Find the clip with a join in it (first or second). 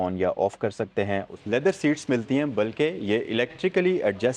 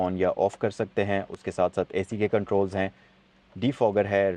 first